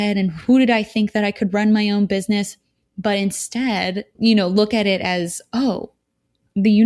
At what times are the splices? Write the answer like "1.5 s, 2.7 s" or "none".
none